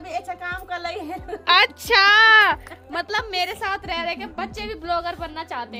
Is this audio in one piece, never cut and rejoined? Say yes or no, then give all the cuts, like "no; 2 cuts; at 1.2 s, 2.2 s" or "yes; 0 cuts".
yes; 0 cuts